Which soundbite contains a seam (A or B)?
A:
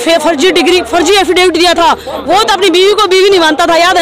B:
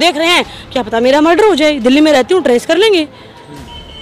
A